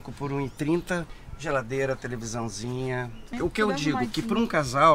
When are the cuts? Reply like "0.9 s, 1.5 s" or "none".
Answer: 1.1 s, 3.3 s

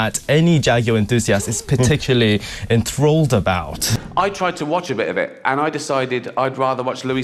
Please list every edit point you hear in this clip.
4.0 s

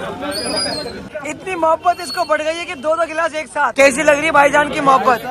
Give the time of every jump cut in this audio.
1.0 s, 3.7 s

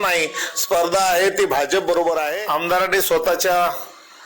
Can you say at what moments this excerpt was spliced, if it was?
2.6 s

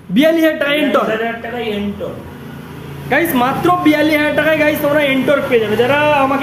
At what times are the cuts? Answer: none

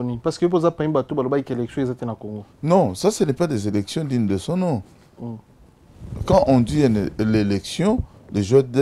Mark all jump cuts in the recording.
none

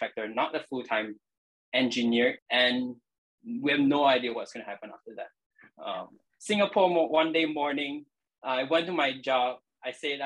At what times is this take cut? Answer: 2.4 s, 6.3 s

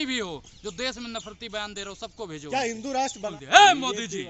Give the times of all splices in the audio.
3.3 s

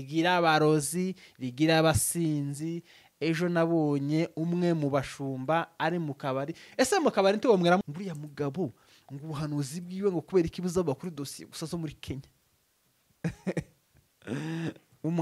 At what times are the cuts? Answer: 7.8 s

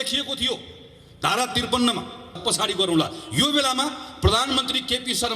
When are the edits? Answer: 2.4 s

